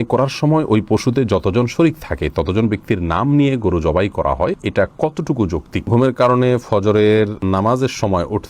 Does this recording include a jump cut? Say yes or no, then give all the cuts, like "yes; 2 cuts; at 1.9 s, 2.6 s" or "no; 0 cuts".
yes; 3 cuts; at 4.6 s, 5.9 s, 7.4 s